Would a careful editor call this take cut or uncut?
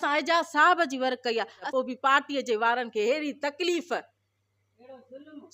cut